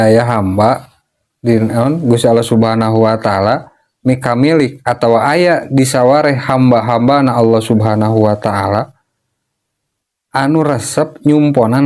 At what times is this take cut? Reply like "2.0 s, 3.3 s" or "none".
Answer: none